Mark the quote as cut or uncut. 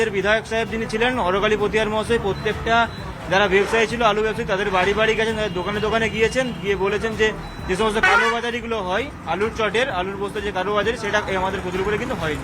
uncut